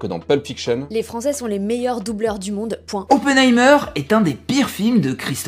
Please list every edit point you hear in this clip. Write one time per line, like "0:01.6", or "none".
0:01.1
0:03.4